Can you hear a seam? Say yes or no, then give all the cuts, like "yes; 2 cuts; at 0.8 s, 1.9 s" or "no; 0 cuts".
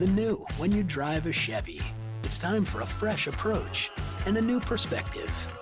no; 0 cuts